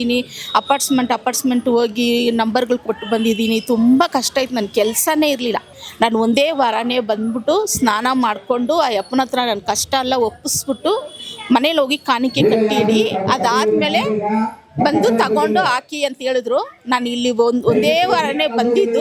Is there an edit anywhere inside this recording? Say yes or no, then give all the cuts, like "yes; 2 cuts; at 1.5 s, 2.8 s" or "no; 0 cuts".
yes; 1 cut; at 5.8 s